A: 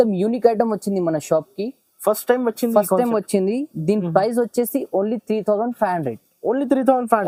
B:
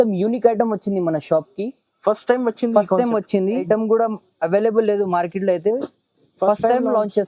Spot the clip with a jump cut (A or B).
B